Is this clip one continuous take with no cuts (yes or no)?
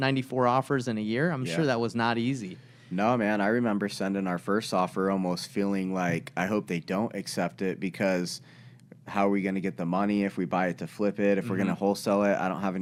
yes